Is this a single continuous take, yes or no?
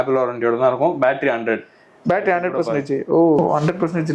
yes